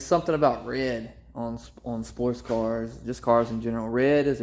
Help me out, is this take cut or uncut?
uncut